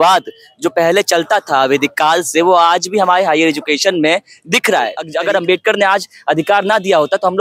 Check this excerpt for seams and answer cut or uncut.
cut